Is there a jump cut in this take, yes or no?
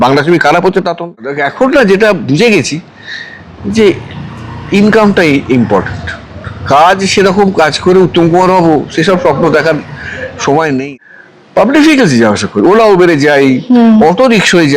yes